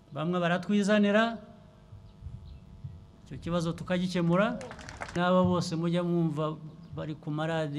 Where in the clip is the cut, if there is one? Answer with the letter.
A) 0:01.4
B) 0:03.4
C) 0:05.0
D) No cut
C